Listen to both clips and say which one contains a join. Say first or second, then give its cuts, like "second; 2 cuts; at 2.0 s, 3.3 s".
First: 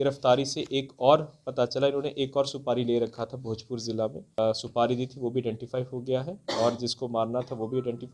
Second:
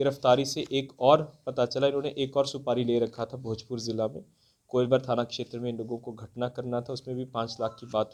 first; 1 cut; at 4.4 s